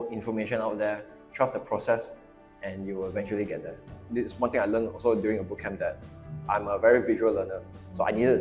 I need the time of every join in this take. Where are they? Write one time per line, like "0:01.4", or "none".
0:01.2
0:03.9